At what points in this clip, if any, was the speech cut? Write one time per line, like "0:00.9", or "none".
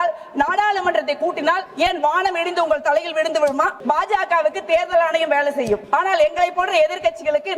0:01.7
0:03.8
0:05.8